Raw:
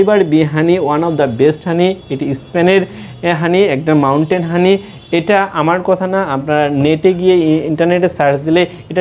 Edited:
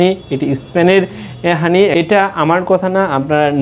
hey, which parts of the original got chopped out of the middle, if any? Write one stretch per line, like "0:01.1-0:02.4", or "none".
0:03.7-0:05.1